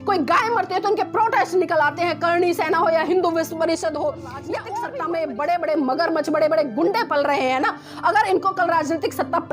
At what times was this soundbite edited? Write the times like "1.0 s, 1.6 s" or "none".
4.6 s